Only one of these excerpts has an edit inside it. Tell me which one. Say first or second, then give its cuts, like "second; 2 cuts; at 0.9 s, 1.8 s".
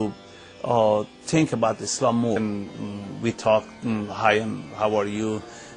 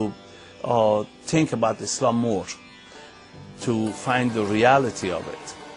second; 1 cut; at 2.4 s